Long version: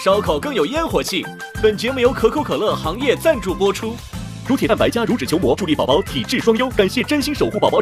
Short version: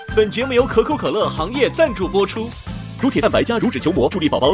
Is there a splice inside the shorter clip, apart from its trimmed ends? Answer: no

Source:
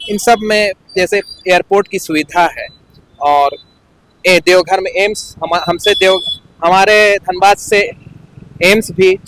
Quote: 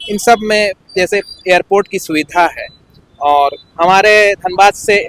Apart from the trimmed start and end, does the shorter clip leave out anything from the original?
yes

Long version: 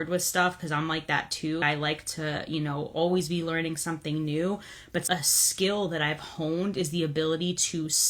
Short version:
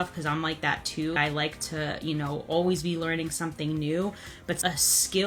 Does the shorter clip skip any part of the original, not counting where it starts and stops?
no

